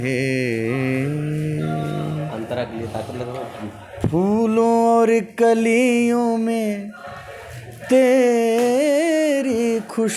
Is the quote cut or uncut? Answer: uncut